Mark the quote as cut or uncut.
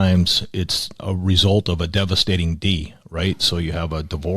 cut